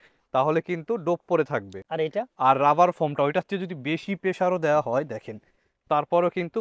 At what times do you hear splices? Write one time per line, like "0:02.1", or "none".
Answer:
none